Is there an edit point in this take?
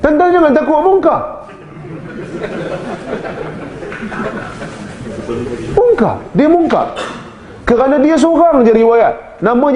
no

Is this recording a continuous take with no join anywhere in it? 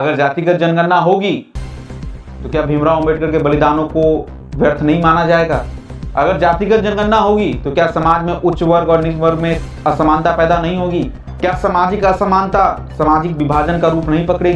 yes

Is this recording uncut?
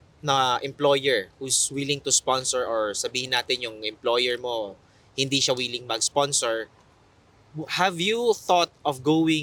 yes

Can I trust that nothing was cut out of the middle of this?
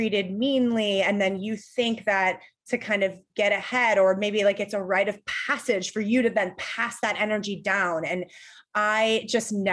yes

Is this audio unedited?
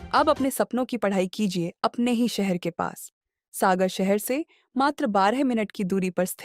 yes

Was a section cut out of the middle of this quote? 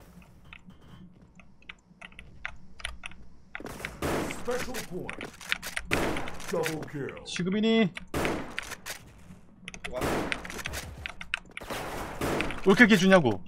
yes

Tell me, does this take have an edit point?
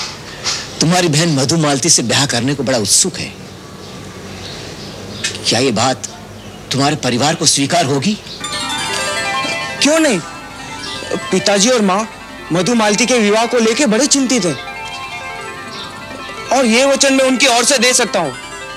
no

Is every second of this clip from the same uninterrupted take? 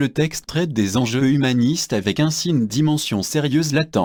yes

